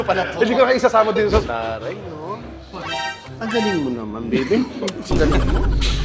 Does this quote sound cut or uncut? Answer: cut